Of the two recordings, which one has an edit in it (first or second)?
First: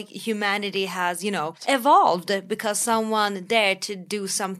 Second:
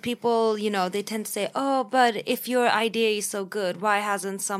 first